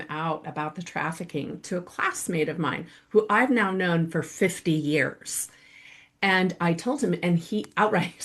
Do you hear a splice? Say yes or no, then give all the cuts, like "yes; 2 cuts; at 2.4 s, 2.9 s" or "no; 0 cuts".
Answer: no; 0 cuts